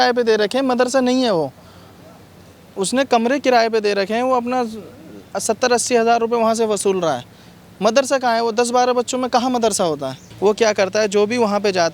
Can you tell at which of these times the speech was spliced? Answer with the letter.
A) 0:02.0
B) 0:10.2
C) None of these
B